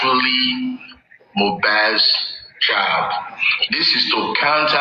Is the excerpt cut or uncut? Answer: cut